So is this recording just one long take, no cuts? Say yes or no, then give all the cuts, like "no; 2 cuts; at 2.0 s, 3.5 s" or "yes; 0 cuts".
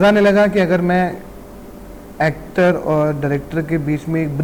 yes; 0 cuts